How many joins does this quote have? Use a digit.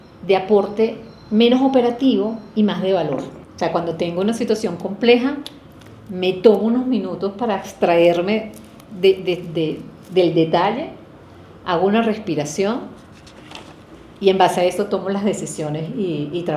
1